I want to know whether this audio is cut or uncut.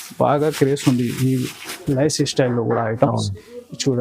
uncut